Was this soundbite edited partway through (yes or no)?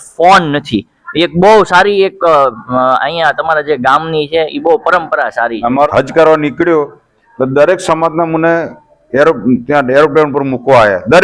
yes